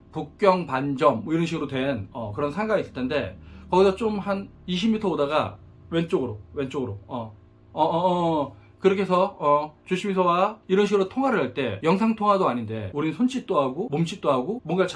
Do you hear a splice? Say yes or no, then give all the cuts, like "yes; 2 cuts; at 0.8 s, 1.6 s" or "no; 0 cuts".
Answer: yes; 3 cuts; at 10.6 s, 11.7 s, 12.8 s